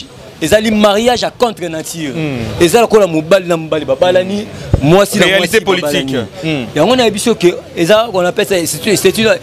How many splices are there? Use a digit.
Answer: 0